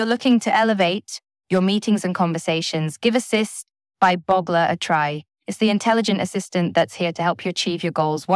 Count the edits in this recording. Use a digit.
0